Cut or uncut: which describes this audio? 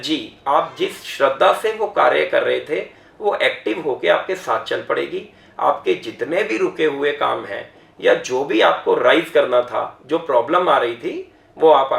uncut